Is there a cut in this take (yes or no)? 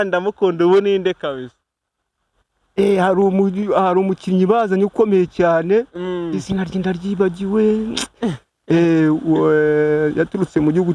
no